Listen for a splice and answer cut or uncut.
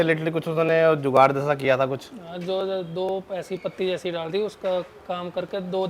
uncut